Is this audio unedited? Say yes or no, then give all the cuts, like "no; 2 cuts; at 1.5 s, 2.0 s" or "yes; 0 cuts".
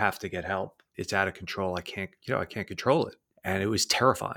no; 1 cut; at 3.2 s